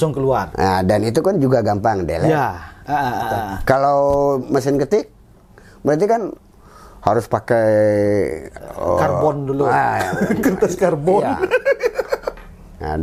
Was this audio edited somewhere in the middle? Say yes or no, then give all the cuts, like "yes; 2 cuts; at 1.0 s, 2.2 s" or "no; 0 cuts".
no; 0 cuts